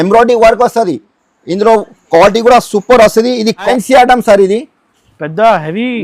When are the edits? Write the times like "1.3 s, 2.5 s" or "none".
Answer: 3.6 s